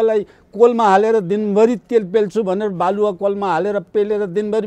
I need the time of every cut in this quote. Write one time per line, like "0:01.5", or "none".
none